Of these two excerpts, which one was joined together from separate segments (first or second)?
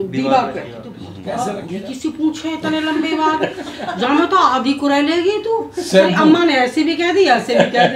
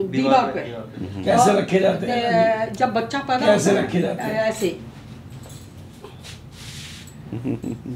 first